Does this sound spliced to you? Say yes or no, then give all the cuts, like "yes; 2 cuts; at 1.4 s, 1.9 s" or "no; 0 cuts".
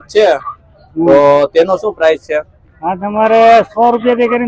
no; 0 cuts